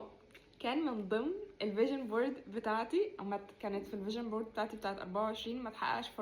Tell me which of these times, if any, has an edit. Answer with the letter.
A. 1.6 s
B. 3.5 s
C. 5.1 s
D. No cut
D